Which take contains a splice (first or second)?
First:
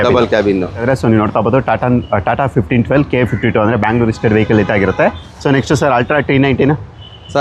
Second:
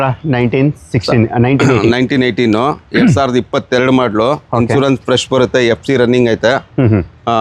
first